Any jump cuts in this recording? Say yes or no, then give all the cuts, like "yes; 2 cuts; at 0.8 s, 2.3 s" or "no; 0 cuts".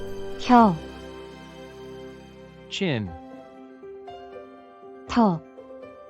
yes; 2 cuts; at 3.1 s, 4.7 s